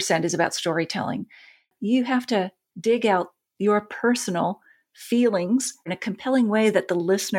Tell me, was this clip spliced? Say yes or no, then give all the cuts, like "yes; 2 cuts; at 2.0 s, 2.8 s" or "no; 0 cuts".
yes; 3 cuts; at 1.7 s, 2.6 s, 5.9 s